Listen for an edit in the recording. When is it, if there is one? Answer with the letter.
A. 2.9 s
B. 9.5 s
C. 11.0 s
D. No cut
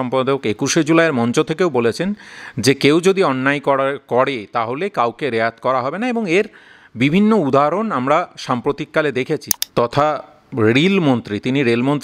B